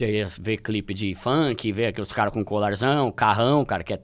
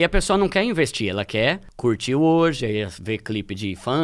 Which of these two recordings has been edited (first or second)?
second